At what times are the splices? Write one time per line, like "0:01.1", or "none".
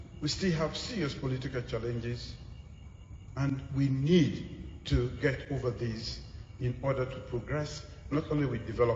none